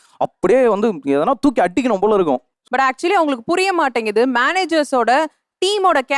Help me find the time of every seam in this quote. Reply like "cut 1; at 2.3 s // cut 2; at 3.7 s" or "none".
cut 1; at 2.5 s